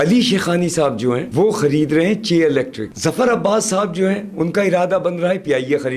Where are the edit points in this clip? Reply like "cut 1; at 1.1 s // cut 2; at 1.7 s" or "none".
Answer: cut 1; at 1.3 s // cut 2; at 2.8 s

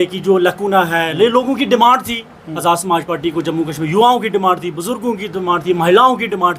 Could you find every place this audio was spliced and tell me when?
none

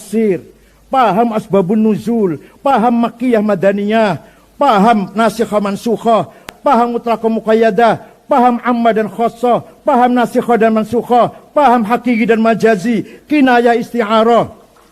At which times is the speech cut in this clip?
cut 1; at 6.5 s

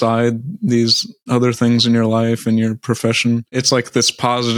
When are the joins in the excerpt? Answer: cut 1; at 1.2 s // cut 2; at 3.5 s

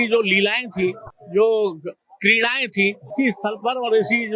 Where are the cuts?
cut 1; at 3.1 s

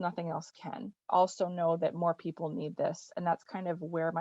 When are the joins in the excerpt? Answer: cut 1; at 1.1 s

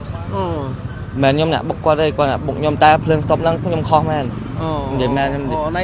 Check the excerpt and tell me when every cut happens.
none

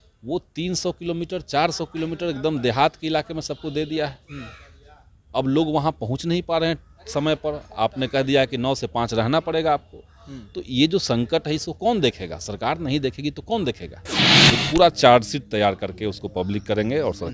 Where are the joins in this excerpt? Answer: cut 1; at 14.2 s

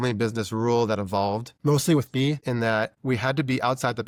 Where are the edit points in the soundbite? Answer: none

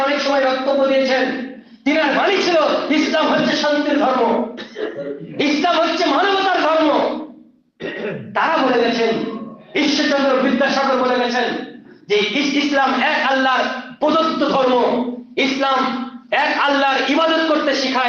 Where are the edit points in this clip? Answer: none

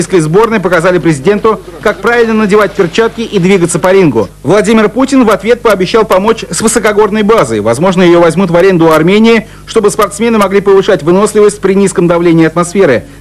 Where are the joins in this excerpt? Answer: cut 1; at 6.1 s

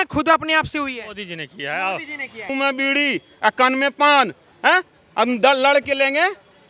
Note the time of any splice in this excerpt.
cut 1; at 2.5 s

